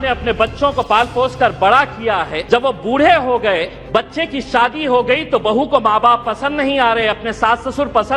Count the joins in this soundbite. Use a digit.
2